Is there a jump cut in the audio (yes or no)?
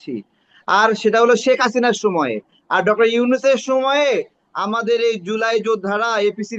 no